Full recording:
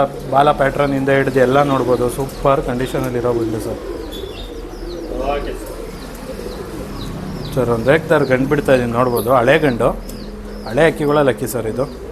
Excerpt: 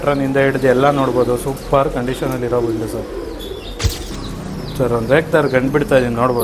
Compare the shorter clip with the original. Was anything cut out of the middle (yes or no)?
yes